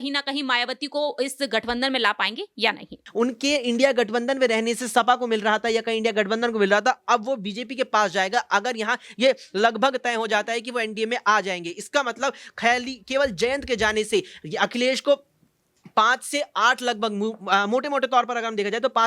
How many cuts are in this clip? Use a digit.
1